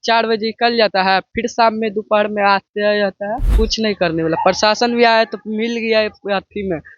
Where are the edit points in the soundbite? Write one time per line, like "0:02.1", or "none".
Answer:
0:03.5

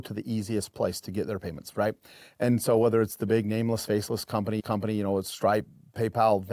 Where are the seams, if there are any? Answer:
none

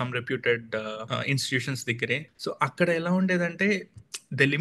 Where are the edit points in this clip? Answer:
0:01.0
0:02.3

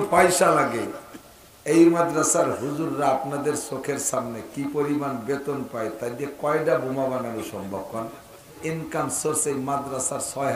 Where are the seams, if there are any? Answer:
0:08.6

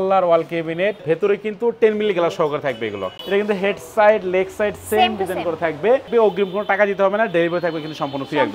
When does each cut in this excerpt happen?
0:01.0
0:03.1
0:06.1

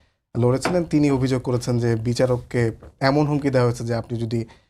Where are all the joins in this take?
none

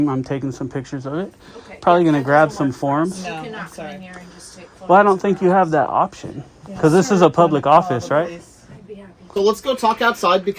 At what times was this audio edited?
0:09.2

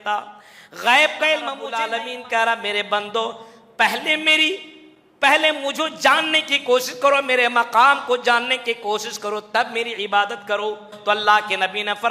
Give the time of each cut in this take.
0:01.8
0:10.9

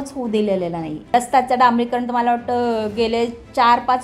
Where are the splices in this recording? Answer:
0:01.1

